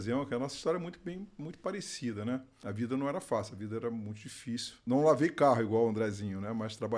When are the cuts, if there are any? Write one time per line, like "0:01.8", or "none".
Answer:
0:02.6
0:04.8